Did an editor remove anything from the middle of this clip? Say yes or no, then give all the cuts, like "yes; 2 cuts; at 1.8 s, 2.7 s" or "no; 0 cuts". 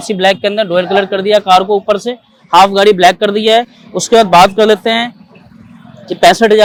no; 0 cuts